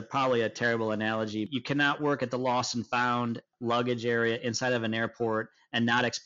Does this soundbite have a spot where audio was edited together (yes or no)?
yes